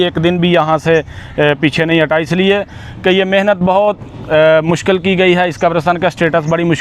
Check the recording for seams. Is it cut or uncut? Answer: uncut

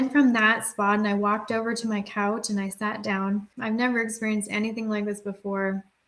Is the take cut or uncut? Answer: cut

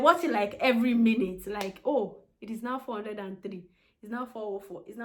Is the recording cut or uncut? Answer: uncut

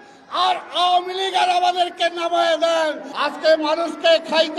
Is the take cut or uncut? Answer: cut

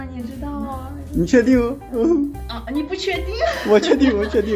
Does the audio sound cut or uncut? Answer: uncut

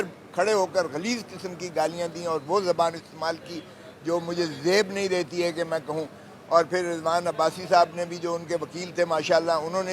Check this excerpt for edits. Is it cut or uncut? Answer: uncut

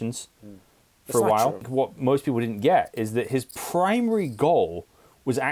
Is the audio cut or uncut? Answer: cut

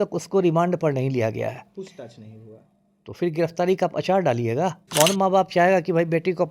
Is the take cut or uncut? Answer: cut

